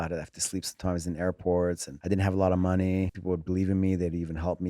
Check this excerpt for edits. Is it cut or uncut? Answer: cut